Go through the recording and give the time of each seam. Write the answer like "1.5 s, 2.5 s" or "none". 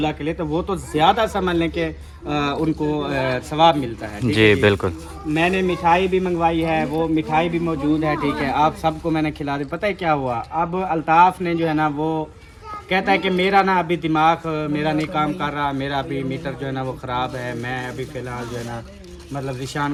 none